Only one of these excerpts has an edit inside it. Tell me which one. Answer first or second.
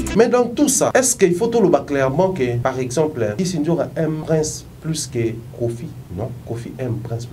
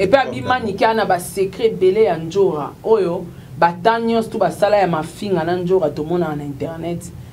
first